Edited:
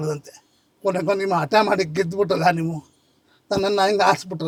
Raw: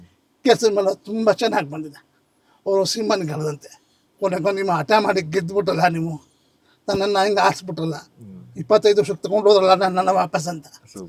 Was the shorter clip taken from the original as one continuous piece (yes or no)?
yes